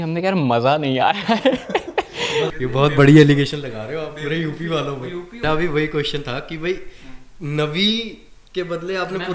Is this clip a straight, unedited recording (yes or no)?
no